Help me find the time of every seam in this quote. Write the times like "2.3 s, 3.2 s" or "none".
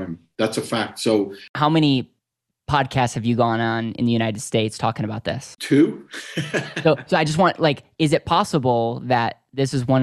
1.5 s, 5.5 s

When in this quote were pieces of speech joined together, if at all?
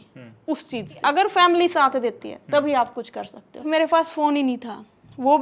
1.0 s, 3.6 s

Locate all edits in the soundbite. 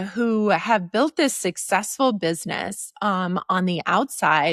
none

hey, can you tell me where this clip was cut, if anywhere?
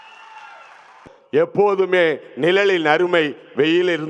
0.9 s

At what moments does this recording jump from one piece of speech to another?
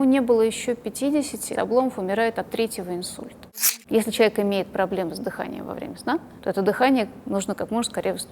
3.6 s

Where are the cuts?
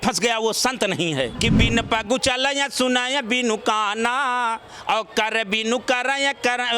1.3 s

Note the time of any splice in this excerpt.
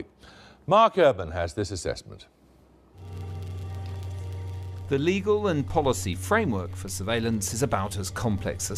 6.1 s

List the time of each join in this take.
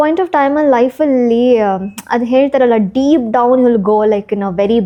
none

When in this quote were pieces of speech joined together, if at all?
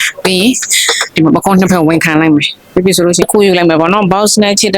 3.2 s

